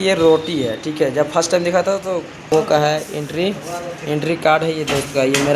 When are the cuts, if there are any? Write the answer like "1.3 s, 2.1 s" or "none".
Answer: 2.5 s